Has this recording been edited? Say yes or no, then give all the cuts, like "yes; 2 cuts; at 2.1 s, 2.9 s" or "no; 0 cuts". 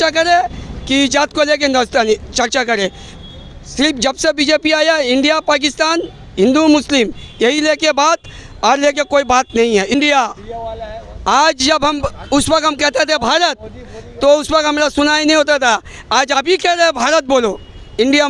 yes; 1 cut; at 9.9 s